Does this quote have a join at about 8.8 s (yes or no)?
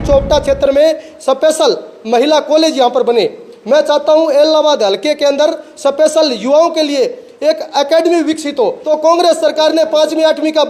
yes